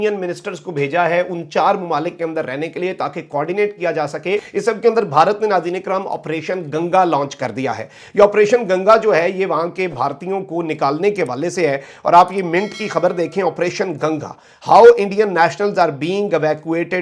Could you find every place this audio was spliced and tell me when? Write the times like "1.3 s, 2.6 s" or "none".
none